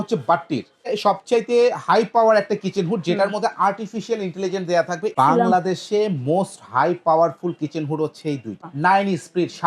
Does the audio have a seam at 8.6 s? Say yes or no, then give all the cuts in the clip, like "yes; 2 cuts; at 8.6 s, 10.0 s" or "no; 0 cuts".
yes; 3 cuts; at 0.9 s, 5.1 s, 8.6 s